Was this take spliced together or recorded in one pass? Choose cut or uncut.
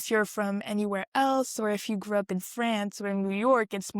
uncut